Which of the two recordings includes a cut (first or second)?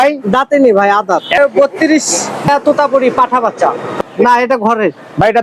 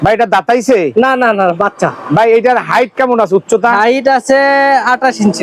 first